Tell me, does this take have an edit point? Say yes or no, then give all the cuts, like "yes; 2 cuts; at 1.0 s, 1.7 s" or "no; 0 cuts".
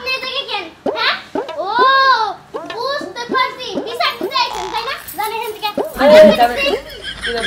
no; 0 cuts